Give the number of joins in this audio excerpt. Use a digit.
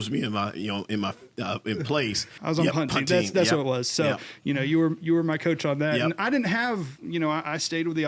1